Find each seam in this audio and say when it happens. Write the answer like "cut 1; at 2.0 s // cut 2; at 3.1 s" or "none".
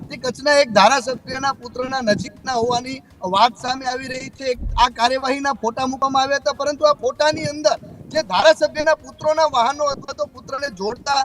cut 1; at 4.7 s

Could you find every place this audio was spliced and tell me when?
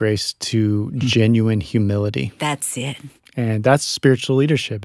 none

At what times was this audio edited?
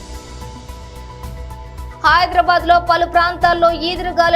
none

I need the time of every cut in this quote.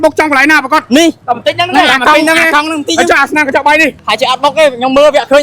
cut 1; at 1.2 s // cut 2; at 4.0 s

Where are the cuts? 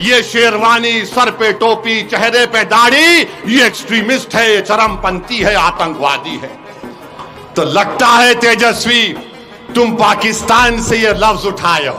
none

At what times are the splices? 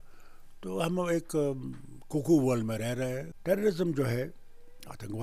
cut 1; at 3.3 s

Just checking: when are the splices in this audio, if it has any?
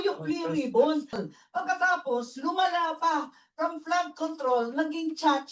cut 1; at 1.2 s

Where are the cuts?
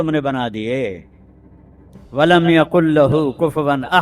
none

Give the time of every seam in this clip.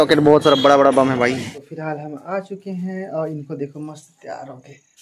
cut 1; at 1.6 s

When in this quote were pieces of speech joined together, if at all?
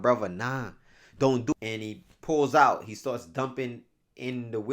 cut 1; at 1.5 s

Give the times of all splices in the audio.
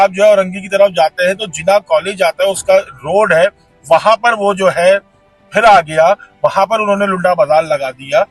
none

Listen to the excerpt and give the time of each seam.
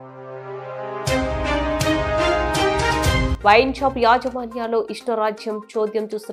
none

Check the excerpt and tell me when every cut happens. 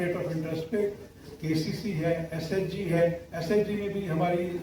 none

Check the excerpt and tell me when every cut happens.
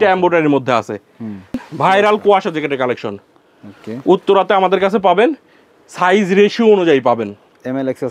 cut 1; at 1.6 s

